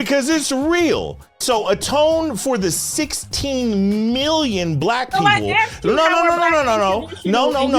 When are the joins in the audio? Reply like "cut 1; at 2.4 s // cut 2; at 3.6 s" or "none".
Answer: cut 1; at 1.4 s